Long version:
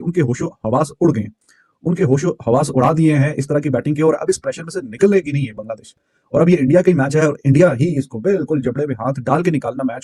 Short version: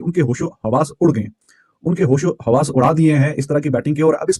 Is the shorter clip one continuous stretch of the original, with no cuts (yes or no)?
yes